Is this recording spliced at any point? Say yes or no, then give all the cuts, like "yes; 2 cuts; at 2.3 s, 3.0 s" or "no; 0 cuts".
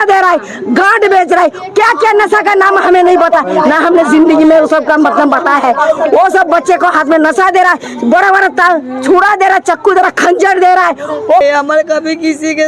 yes; 1 cut; at 11.4 s